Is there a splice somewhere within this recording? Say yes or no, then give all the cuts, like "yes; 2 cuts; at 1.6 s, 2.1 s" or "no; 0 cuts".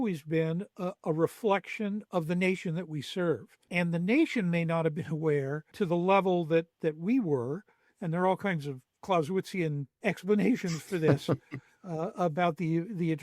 yes; 4 cuts; at 2.0 s, 3.6 s, 5.7 s, 10.0 s